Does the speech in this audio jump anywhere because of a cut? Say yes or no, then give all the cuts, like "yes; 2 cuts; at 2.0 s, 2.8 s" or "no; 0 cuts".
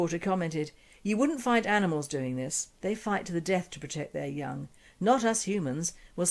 no; 0 cuts